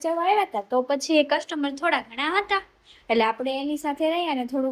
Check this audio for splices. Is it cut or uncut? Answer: uncut